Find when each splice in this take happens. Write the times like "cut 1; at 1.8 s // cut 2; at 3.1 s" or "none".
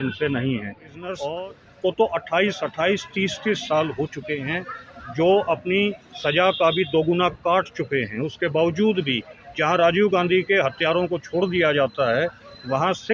cut 1; at 1.2 s